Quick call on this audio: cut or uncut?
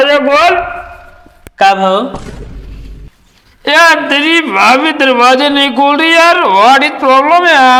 uncut